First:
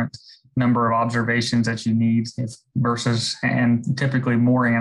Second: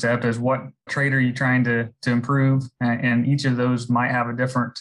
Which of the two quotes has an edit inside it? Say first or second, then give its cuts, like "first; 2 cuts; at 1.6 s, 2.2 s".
second; 1 cut; at 0.9 s